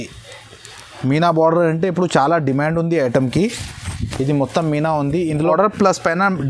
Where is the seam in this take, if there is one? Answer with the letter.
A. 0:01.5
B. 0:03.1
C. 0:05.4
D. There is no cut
C